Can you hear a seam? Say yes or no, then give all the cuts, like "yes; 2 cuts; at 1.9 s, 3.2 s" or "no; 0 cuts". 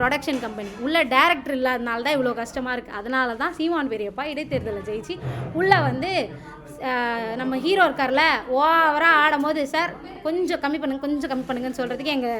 no; 0 cuts